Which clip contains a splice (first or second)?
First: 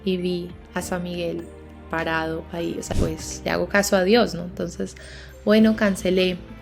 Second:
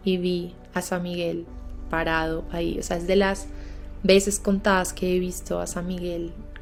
first